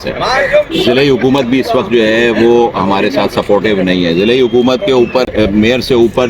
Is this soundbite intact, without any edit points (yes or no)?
no